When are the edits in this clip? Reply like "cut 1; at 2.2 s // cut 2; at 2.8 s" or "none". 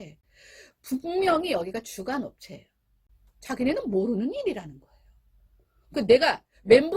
cut 1; at 3.1 s